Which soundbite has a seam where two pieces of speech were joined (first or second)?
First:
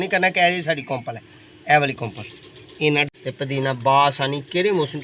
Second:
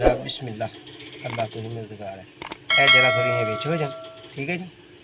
first